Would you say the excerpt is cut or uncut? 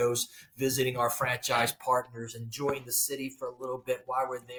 uncut